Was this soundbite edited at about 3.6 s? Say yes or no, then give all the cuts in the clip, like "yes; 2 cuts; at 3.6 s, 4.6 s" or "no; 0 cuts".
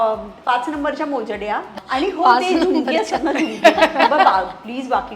no; 1 cut; at 1.7 s